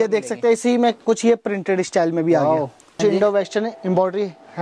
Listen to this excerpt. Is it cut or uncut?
cut